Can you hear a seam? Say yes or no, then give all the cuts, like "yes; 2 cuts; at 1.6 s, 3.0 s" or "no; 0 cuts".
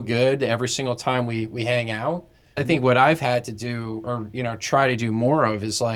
no; 0 cuts